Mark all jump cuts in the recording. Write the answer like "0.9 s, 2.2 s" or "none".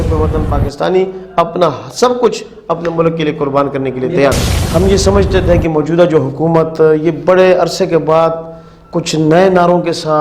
4.5 s